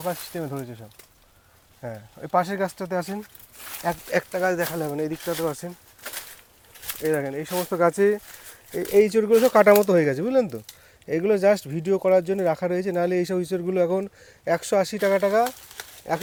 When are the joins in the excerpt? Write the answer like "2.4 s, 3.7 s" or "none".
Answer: none

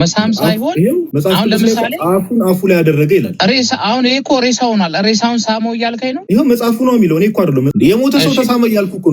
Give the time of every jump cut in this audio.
1.1 s, 3.3 s, 6.2 s, 7.7 s

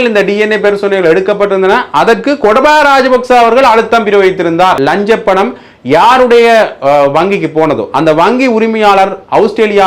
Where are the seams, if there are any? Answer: 4.8 s

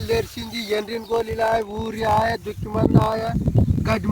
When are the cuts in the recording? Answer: none

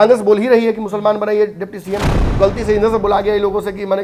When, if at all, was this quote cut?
2.2 s

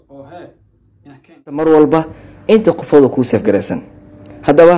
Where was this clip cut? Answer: 1.6 s

